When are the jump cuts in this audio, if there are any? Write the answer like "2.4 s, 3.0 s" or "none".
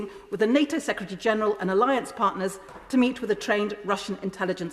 none